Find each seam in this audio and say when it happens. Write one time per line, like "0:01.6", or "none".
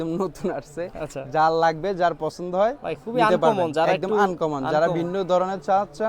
none